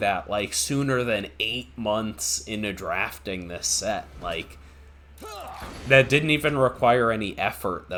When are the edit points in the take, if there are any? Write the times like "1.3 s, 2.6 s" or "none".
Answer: none